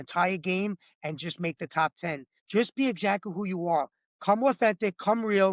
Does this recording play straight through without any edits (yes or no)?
no